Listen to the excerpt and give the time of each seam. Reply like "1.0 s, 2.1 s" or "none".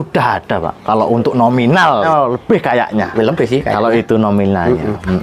2.1 s